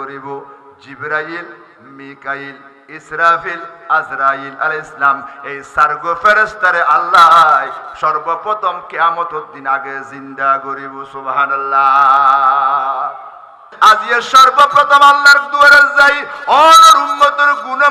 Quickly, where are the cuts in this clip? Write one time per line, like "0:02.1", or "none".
0:13.7